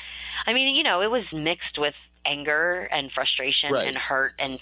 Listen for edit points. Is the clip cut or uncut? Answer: cut